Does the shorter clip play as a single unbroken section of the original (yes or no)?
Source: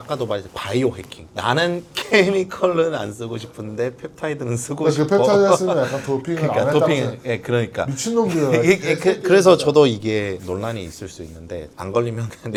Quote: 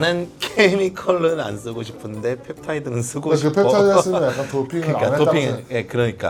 yes